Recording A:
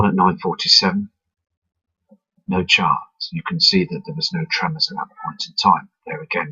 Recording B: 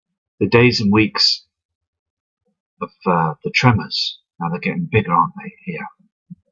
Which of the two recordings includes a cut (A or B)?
A